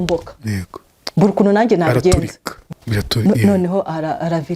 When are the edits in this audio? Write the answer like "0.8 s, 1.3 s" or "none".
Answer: 2.7 s